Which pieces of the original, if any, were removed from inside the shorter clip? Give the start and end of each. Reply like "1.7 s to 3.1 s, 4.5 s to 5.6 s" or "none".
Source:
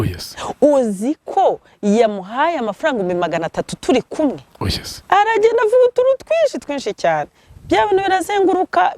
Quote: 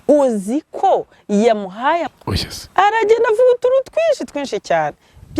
2.7 s to 4.5 s